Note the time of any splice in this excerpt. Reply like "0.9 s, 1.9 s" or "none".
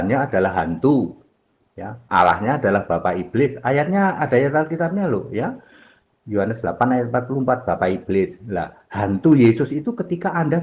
none